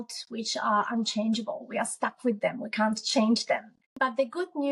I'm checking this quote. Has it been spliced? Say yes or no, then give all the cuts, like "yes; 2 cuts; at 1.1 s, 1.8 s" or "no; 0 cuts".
yes; 1 cut; at 3.8 s